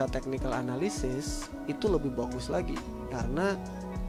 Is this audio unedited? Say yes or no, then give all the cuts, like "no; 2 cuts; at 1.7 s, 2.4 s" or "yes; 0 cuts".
yes; 0 cuts